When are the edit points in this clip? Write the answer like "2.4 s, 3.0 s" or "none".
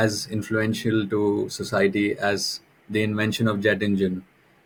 none